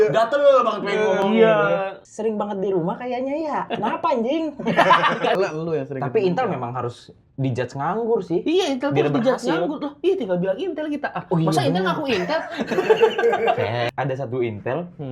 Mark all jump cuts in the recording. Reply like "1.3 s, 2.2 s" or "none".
2.0 s, 3.7 s, 5.4 s, 13.9 s